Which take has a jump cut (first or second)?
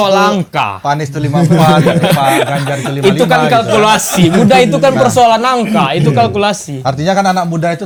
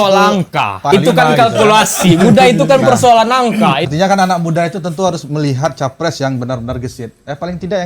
second